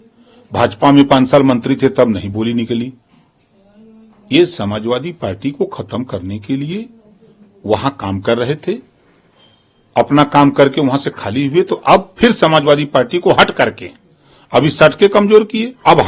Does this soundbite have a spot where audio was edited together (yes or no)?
no